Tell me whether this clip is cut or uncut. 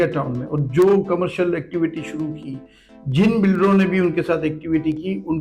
uncut